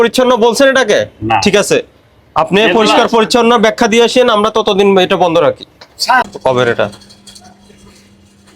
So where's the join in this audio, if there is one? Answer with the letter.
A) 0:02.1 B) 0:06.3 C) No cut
B